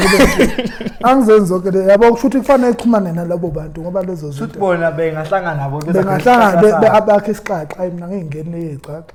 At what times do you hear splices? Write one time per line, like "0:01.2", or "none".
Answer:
none